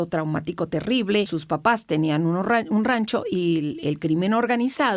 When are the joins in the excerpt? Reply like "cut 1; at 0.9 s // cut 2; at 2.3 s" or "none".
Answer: cut 1; at 1.4 s